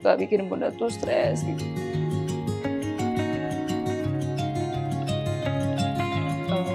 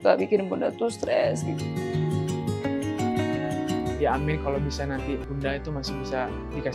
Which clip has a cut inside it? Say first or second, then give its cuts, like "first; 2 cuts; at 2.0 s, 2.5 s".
second; 2 cuts; at 3.9 s, 5.3 s